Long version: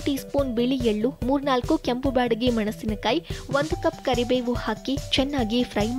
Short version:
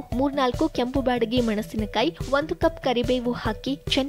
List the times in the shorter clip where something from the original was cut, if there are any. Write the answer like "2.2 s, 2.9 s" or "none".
2.2 s